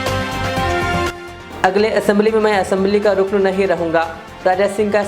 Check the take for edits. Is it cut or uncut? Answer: cut